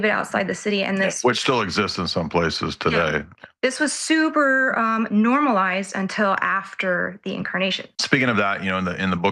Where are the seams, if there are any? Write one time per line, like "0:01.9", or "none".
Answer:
0:07.9